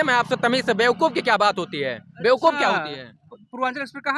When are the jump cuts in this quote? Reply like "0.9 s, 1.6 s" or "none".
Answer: none